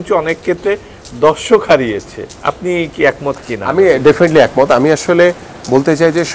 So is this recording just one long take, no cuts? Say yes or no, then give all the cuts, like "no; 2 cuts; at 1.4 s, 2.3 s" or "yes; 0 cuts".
yes; 0 cuts